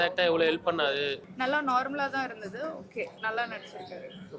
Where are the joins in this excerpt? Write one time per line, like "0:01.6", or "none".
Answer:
0:01.3